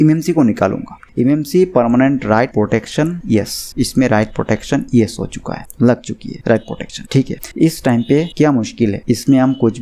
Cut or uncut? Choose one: cut